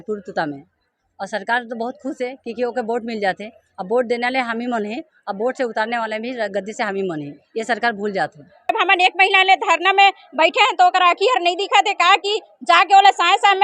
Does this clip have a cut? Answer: yes; 1 cut; at 8.7 s

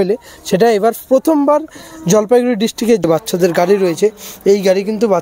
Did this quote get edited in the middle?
yes; 1 cut; at 3.0 s

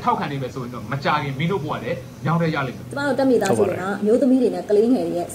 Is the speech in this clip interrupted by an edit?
yes; 1 cut; at 3.0 s

